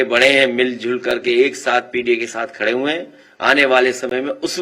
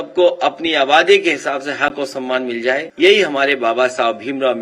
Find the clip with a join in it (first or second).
second